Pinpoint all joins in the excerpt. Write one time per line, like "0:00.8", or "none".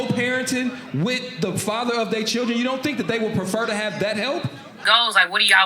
0:04.7